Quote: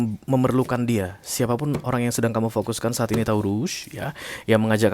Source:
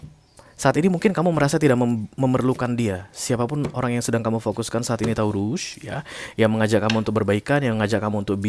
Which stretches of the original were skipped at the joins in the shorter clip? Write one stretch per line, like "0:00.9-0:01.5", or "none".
none